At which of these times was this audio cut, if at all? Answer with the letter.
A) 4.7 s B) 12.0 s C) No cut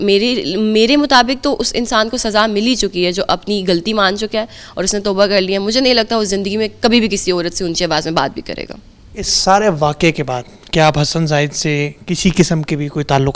C